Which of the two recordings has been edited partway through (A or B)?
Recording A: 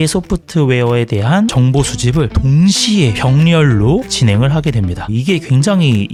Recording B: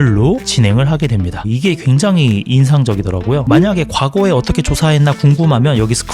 B